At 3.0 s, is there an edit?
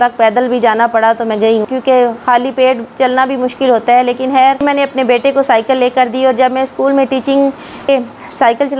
no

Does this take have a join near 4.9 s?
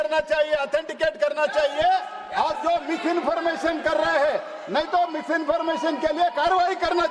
no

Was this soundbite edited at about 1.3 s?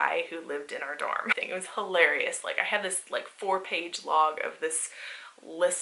yes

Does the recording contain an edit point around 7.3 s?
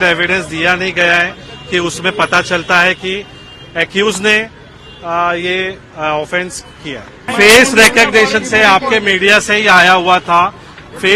yes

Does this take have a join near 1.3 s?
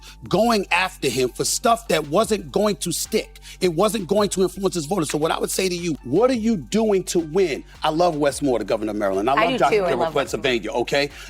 no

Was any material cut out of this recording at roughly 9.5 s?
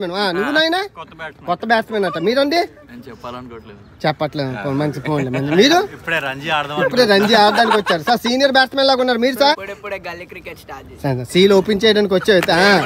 yes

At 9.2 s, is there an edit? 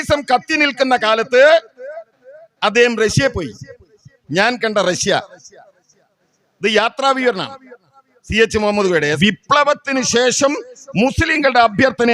yes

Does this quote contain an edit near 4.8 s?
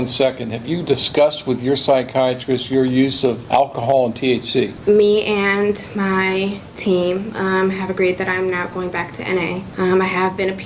yes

